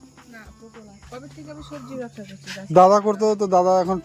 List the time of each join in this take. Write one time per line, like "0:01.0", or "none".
0:01.0